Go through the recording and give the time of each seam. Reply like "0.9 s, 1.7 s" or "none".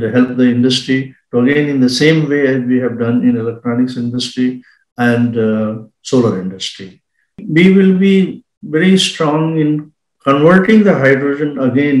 7.4 s